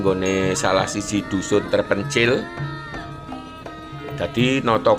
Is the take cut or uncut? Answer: uncut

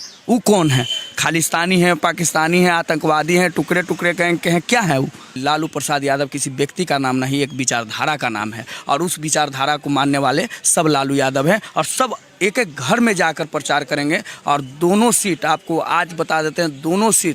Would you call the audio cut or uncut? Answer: cut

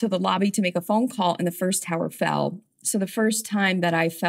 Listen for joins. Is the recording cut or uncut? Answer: uncut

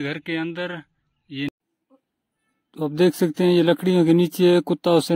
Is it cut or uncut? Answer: cut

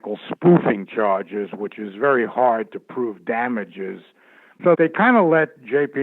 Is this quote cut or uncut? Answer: cut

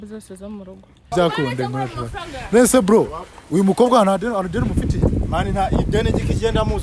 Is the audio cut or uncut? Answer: cut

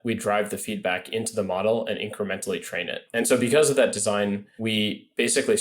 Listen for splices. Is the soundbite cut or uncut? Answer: cut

